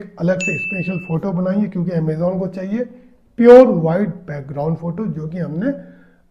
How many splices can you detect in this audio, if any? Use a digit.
0